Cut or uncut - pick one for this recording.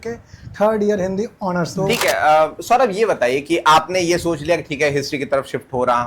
cut